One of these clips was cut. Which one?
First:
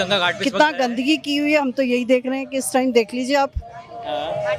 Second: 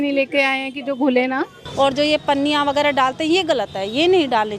second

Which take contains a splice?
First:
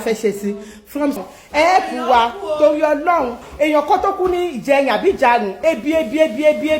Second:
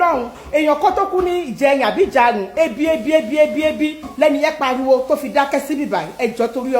first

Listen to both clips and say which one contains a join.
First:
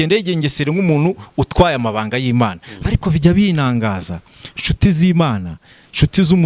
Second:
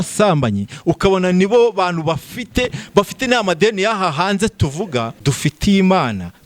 second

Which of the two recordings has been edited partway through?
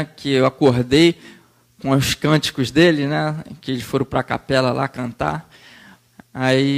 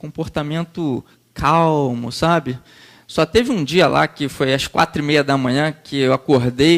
second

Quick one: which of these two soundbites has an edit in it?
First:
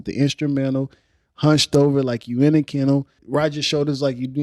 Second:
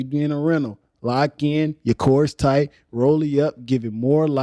first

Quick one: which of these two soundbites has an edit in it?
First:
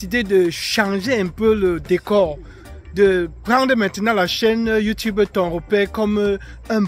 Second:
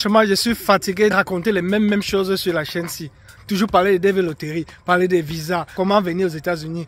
second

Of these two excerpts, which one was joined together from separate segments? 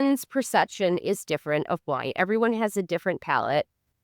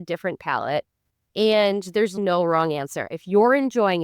second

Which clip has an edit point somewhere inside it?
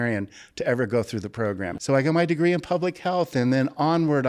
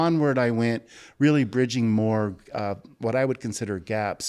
first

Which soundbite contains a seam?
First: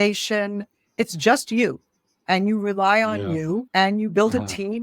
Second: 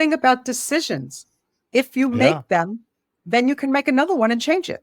first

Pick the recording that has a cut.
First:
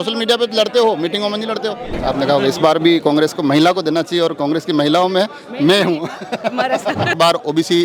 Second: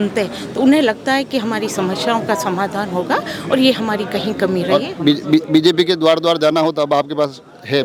first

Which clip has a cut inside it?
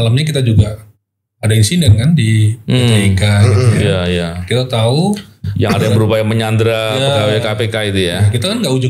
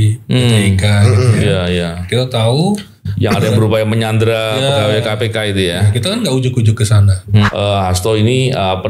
second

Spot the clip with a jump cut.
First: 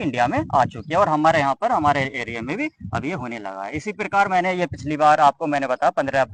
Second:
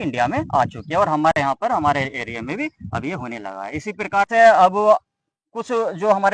second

